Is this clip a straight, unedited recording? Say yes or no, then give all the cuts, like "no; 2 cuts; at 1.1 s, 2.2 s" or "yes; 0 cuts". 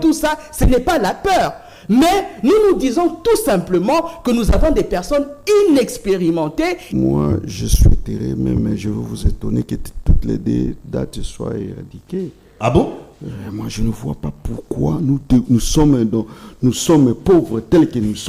no; 1 cut; at 6.8 s